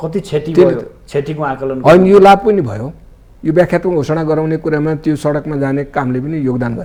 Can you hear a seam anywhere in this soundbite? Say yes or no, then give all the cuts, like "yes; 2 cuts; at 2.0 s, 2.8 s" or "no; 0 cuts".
no; 0 cuts